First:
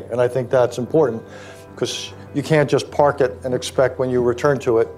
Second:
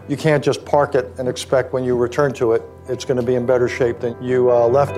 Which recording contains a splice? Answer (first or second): second